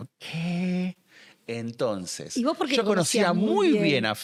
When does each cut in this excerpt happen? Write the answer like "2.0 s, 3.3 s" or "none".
none